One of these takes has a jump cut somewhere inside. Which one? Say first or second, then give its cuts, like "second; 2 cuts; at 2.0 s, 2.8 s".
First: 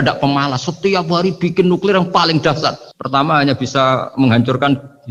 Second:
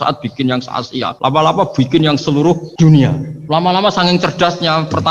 second; 3 cuts; at 1.1 s, 2.7 s, 3.3 s